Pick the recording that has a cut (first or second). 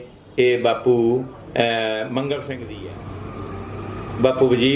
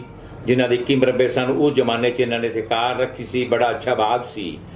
first